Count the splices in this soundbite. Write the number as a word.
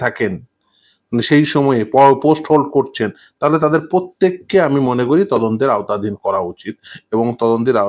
zero